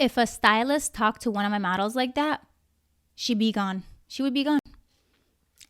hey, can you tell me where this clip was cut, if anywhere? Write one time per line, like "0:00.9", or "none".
none